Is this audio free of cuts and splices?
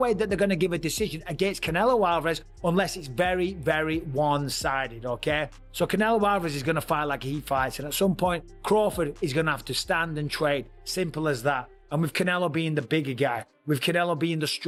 yes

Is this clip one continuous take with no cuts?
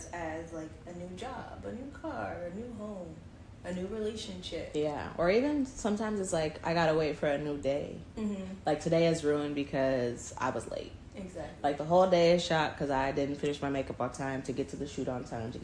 yes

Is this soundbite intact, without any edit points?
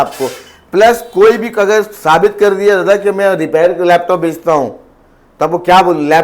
yes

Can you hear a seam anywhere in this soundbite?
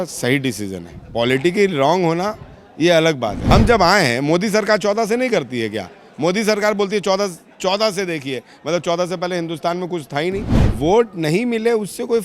yes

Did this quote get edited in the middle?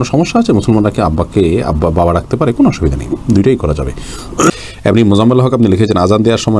no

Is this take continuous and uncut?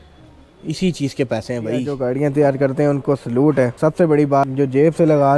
no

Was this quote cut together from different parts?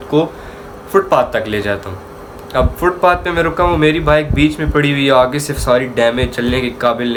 no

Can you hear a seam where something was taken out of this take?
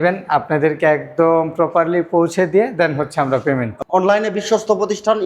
yes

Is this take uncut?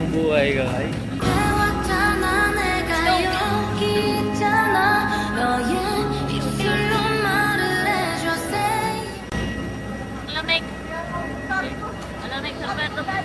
yes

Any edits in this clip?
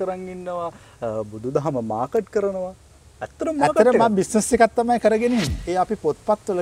yes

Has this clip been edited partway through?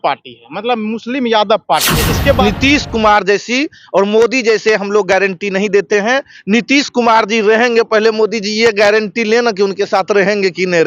yes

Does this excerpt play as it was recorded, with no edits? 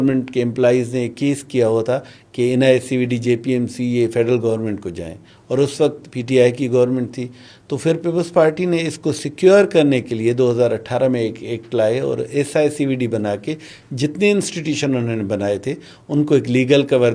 yes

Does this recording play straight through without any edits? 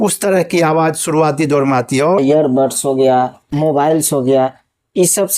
no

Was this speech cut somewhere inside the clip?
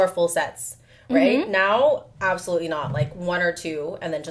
no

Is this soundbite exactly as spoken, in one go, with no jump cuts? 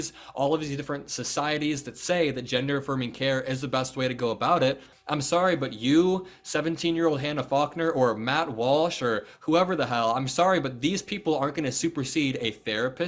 yes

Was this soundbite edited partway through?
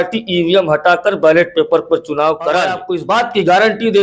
yes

